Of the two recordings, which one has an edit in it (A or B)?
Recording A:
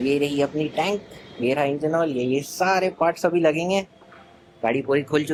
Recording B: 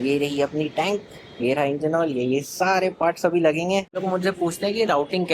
B